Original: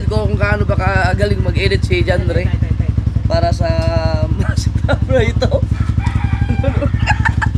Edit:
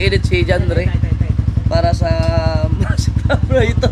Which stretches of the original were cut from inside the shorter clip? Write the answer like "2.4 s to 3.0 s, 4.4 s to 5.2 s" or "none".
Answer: none